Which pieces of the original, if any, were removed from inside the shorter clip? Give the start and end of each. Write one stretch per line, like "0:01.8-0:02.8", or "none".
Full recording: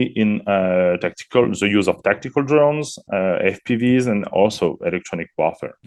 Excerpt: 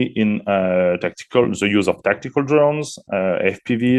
none